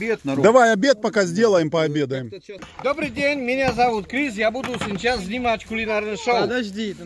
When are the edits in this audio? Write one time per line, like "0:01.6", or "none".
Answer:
0:02.7